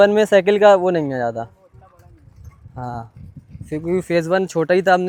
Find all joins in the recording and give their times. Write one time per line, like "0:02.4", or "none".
none

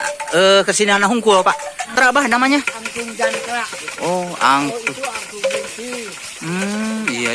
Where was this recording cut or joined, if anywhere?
0:01.9

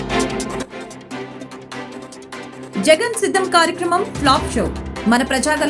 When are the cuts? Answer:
0:02.2

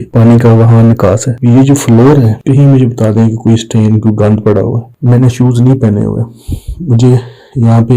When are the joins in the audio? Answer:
0:01.3

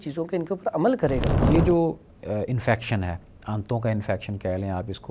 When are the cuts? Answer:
0:01.4

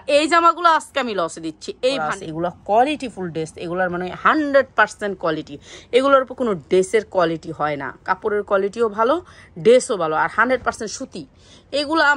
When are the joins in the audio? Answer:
0:02.1

